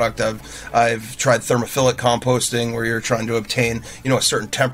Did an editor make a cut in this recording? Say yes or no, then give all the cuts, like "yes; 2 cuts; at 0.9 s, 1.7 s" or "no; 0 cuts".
no; 0 cuts